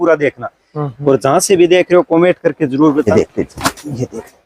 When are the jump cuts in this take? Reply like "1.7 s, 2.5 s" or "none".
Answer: 3.1 s